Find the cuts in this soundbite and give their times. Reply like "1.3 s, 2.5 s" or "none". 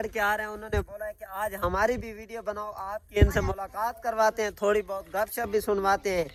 none